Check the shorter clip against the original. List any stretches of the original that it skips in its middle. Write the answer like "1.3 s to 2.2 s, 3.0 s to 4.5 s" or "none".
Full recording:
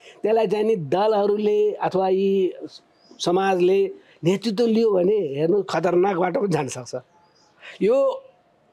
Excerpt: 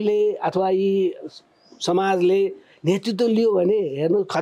none